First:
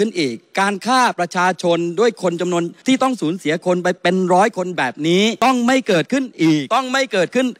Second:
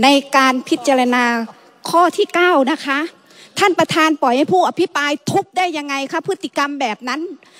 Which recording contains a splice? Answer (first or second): first